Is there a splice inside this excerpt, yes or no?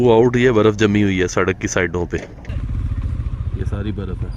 yes